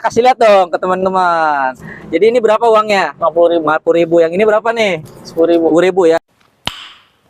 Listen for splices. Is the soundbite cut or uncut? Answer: cut